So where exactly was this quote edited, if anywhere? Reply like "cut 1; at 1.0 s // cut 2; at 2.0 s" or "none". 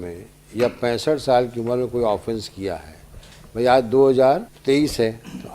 cut 1; at 4.5 s